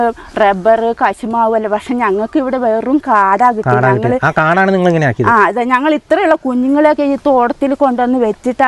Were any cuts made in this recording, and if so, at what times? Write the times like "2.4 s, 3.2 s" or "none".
none